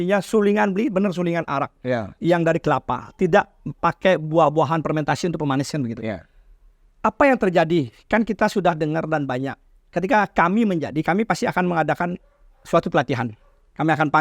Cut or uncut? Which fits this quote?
uncut